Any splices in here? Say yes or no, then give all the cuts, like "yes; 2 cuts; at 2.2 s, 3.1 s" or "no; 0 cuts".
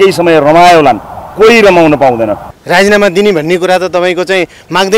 yes; 1 cut; at 2.4 s